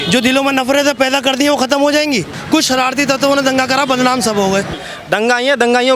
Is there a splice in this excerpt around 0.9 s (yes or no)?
no